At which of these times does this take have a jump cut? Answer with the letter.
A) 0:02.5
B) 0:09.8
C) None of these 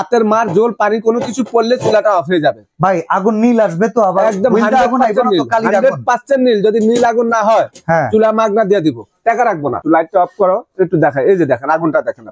B